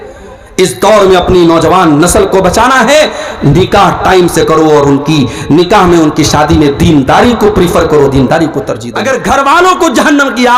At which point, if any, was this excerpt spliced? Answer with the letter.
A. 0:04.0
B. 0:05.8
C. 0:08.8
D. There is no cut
C